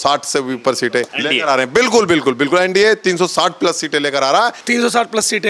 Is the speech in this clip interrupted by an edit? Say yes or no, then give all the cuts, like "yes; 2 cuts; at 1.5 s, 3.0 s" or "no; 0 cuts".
yes; 2 cuts; at 1.1 s, 4.6 s